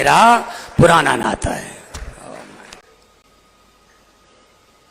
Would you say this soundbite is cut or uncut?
cut